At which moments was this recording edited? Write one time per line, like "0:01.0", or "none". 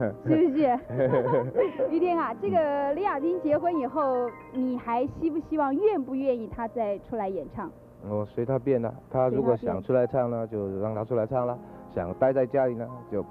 0:01.8